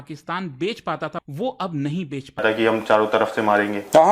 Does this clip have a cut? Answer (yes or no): yes